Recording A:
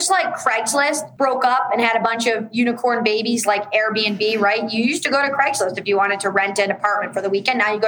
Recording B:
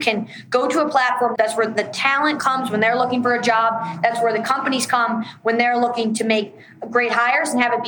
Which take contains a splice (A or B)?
A